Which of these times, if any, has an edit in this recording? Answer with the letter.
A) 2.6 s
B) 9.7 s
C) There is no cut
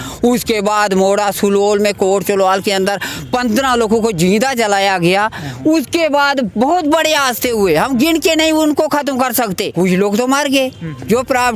B